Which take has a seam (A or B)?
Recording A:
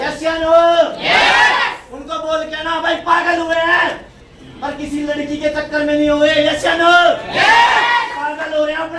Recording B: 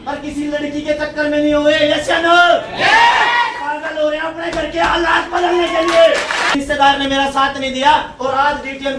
B